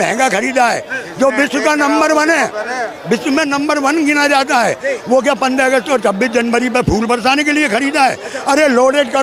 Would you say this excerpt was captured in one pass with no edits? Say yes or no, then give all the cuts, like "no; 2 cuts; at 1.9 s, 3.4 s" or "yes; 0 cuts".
yes; 0 cuts